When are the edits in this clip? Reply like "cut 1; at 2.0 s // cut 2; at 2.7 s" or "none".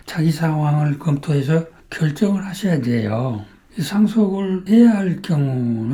none